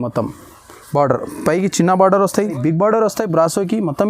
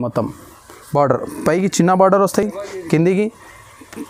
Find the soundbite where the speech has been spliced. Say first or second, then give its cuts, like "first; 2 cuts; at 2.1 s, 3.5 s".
first; 1 cut; at 2.5 s